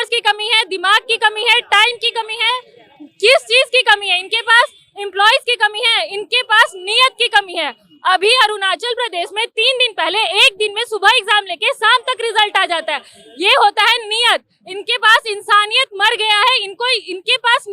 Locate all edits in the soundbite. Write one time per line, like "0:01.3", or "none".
none